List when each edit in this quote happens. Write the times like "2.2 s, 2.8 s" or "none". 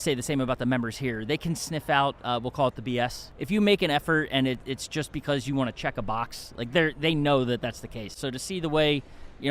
3.3 s, 8.2 s